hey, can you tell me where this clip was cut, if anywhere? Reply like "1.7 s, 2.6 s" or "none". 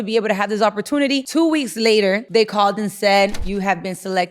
1.2 s, 2.2 s, 3.4 s